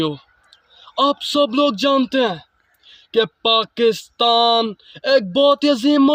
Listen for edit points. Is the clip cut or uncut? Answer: uncut